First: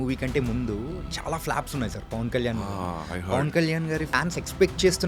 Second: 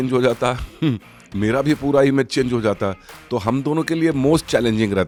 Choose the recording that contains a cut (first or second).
first